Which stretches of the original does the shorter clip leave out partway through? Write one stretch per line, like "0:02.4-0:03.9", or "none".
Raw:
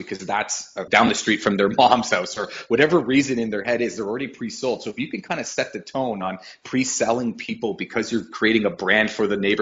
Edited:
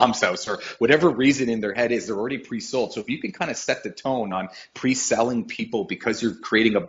none